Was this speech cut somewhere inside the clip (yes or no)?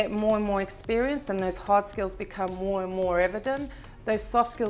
no